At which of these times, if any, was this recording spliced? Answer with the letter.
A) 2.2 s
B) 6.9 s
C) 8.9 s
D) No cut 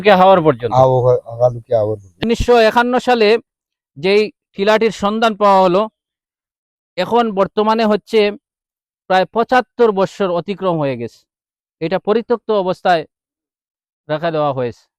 A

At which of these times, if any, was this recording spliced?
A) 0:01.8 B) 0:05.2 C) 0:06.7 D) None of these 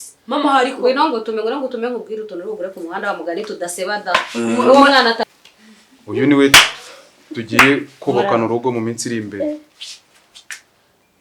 B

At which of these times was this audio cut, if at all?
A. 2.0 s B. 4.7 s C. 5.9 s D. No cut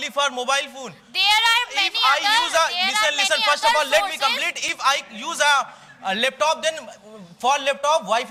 D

